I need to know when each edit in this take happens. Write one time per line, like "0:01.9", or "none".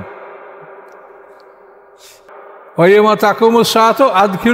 0:02.3